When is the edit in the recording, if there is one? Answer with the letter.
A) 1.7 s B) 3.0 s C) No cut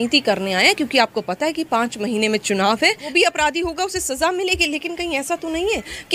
B